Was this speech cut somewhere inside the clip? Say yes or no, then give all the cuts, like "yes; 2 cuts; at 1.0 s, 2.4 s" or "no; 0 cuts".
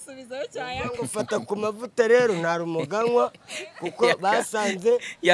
no; 0 cuts